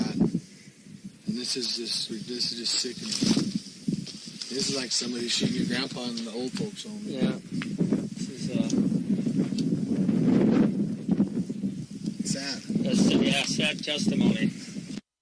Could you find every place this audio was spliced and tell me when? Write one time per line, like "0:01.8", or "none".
0:07.4